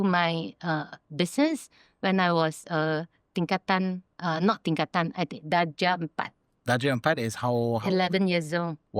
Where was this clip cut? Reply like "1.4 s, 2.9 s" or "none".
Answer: 4.1 s